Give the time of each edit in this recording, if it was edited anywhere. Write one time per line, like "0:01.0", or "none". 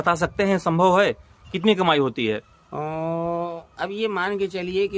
none